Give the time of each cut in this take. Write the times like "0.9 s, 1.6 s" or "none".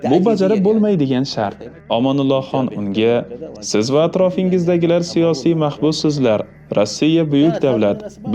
1.7 s